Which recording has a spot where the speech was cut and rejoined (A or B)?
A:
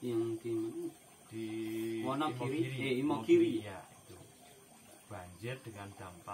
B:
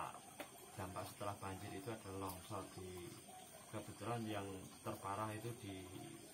A